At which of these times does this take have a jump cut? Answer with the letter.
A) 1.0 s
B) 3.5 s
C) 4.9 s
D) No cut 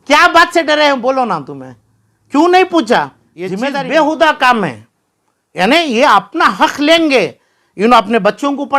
B